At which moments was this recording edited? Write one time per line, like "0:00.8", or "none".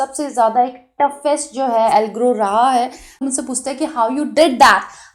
0:03.2